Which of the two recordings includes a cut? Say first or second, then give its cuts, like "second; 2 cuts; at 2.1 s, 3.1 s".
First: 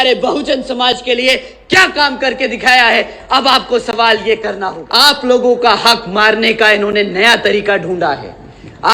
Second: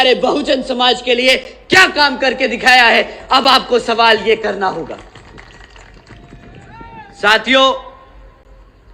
first; 1 cut; at 4.8 s